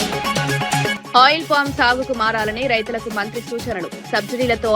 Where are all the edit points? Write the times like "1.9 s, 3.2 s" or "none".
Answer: 1.0 s